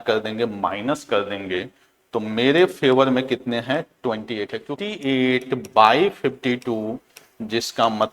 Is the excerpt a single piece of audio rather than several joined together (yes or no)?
no